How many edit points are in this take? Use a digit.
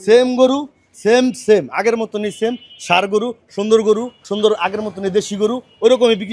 1